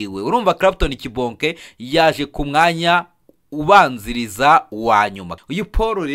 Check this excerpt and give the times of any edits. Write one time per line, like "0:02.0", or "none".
0:05.3